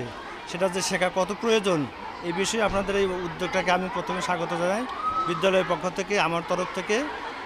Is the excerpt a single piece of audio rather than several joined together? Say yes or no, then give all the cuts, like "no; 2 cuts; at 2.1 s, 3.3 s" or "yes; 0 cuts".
yes; 0 cuts